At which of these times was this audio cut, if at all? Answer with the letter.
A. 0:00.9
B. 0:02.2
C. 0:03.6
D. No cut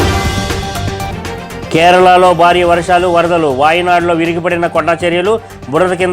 A